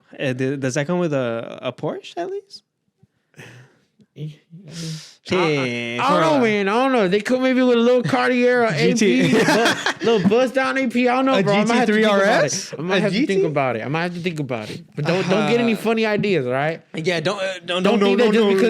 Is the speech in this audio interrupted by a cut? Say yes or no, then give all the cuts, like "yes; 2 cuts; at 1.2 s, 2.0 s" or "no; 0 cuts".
no; 0 cuts